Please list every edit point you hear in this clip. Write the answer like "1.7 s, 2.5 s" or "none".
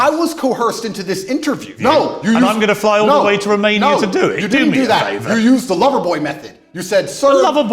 1.7 s

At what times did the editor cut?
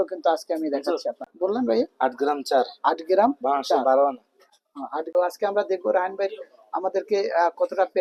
1.3 s, 5.1 s

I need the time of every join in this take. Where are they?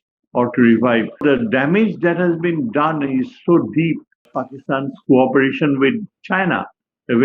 1.2 s, 4.4 s

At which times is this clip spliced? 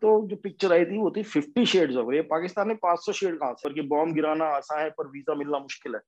3.6 s

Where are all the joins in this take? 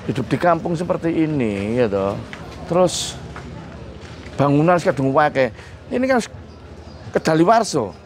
none

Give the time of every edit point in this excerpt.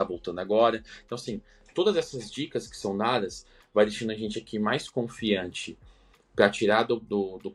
none

